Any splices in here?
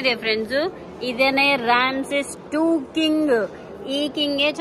no; 0 cuts

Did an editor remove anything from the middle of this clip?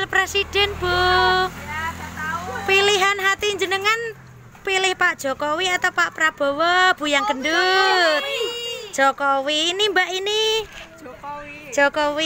no; 0 cuts

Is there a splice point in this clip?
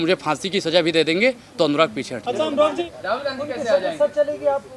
yes; 1 cut; at 2.9 s

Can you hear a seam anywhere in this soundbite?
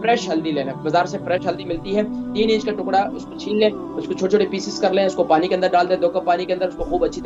no; 0 cuts

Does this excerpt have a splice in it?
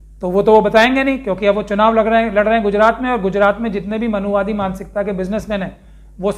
no; 0 cuts

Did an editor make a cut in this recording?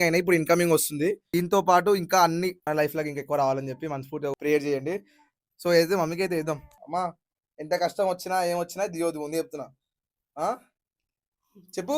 no; 0 cuts

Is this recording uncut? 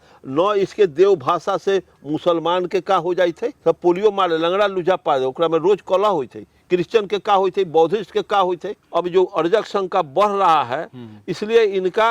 no; 2 cuts; at 3.5 s, 8.7 s

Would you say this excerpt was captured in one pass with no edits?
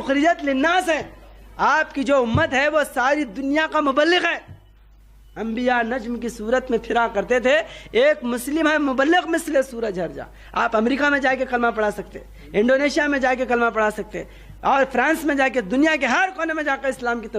yes; 0 cuts

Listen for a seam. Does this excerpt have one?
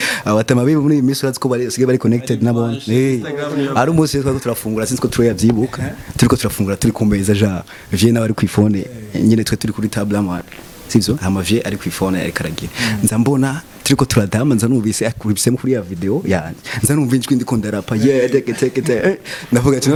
no; 0 cuts

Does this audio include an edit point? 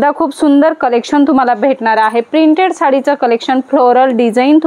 no; 0 cuts

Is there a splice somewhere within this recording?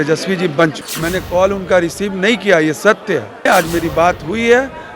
yes; 2 cuts; at 0.9 s, 3.5 s

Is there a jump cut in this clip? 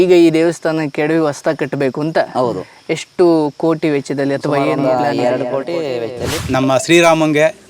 yes; 1 cut; at 6.4 s

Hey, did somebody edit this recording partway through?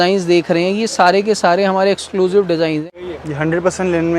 yes; 1 cut; at 2.9 s

